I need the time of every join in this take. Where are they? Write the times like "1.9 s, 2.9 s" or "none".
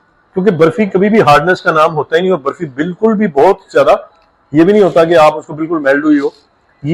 none

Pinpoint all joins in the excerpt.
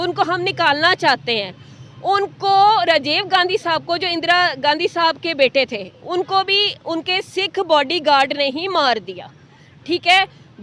none

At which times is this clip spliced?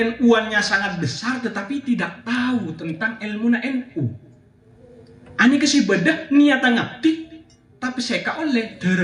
none

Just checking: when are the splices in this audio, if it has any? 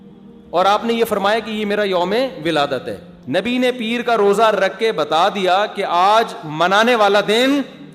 3.1 s

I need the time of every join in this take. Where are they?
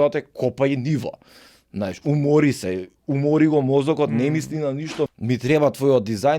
5.1 s

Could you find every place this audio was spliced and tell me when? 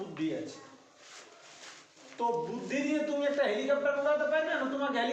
none

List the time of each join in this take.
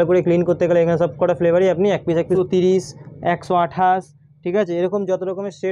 2.4 s

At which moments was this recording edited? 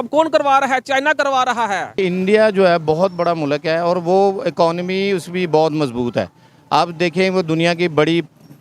2.0 s

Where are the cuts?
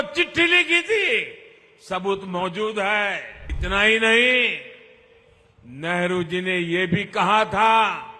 3.5 s

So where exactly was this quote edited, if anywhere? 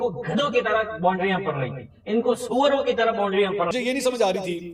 3.7 s

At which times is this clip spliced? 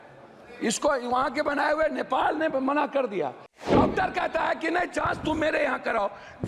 3.7 s

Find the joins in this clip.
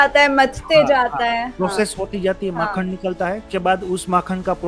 3.4 s

